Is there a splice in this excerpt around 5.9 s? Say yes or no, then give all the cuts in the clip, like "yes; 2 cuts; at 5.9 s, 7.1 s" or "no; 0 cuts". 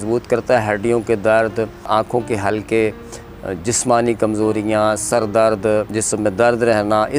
yes; 2 cuts; at 1.8 s, 5.9 s